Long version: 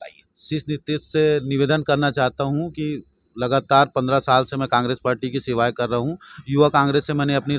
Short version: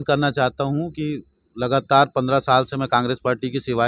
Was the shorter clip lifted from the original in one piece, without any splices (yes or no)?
yes